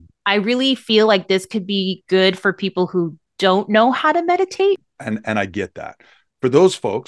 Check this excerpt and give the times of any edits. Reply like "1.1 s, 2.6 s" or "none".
4.9 s